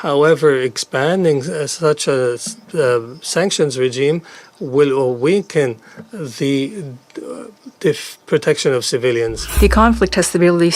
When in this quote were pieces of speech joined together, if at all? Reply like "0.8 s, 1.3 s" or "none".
9.4 s